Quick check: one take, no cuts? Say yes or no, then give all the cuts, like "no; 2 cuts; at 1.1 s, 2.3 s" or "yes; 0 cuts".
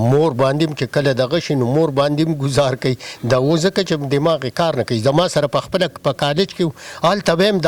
yes; 0 cuts